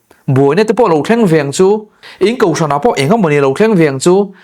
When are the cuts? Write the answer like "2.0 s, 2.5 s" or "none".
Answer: 2.0 s